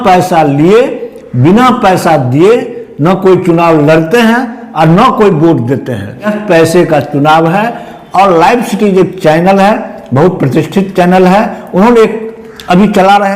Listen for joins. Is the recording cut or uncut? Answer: cut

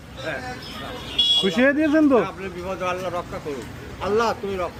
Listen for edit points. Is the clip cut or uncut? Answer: uncut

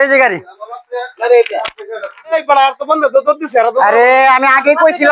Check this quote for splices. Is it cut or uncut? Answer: cut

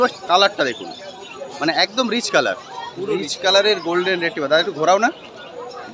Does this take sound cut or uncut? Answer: uncut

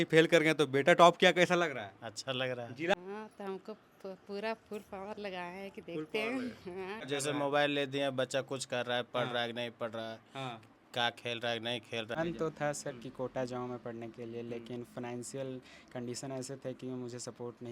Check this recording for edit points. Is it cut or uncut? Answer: cut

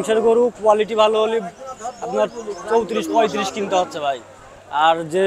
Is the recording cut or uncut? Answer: uncut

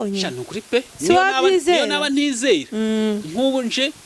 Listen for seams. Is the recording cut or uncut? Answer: uncut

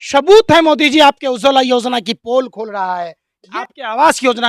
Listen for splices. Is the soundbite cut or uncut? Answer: cut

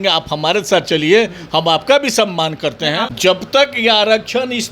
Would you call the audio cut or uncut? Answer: cut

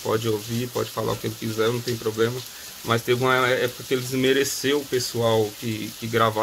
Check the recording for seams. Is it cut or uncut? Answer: uncut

